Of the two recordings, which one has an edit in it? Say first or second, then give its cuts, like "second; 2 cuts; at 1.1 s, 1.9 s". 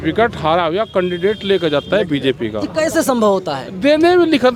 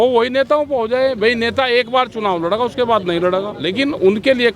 second; 1 cut; at 3.6 s